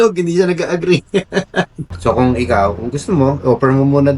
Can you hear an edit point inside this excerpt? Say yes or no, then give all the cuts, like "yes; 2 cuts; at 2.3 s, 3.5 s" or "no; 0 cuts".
yes; 1 cut; at 1.8 s